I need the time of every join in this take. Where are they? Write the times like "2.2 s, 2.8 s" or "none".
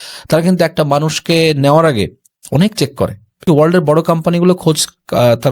3.4 s